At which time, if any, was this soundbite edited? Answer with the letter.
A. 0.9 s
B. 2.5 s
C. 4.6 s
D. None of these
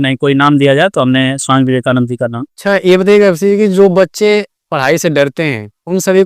B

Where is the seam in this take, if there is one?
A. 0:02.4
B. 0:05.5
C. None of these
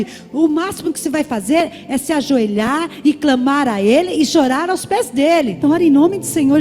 B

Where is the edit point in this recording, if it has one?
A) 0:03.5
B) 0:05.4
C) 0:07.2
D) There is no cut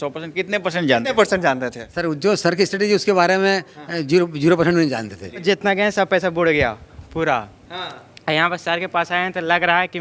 B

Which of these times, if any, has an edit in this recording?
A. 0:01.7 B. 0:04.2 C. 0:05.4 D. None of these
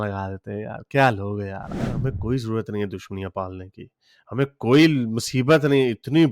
A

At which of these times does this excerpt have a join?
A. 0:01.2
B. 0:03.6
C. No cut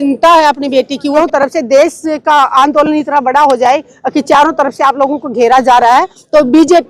A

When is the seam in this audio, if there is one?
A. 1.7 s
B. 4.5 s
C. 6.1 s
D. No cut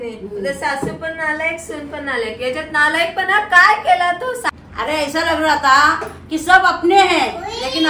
B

